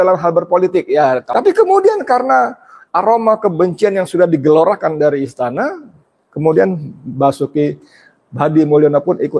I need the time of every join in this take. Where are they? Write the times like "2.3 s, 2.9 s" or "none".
1.2 s

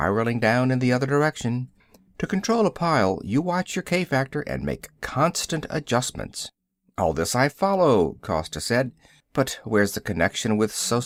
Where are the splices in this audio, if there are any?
none

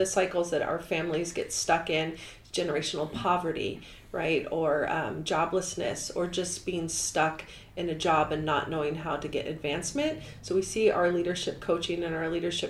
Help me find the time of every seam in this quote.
none

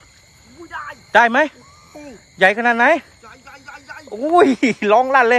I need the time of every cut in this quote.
none

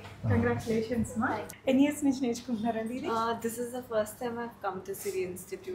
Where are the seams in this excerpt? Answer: 1.5 s

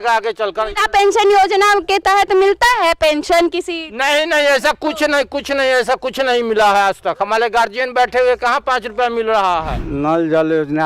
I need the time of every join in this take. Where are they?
9.8 s

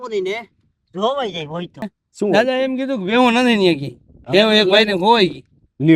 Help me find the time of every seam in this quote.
1.9 s

